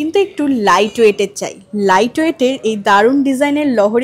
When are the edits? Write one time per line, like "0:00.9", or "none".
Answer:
none